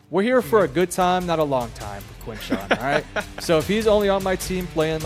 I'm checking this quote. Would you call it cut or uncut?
uncut